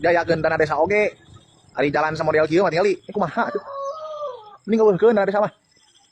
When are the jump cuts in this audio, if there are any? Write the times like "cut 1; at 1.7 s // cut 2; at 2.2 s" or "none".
none